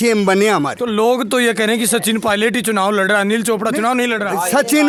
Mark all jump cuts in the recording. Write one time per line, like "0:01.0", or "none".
none

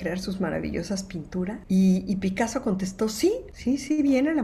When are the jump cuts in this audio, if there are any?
0:01.6
0:03.5

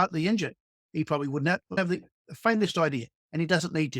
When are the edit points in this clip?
0:01.8

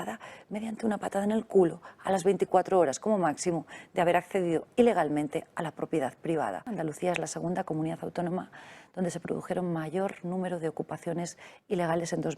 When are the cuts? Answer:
0:06.7

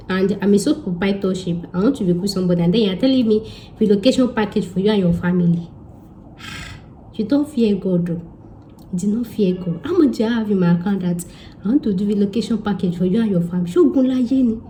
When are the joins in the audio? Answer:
none

